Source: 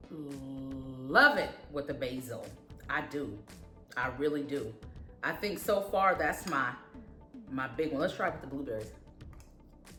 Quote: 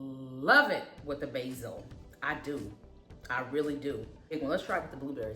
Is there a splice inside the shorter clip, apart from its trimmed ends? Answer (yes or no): yes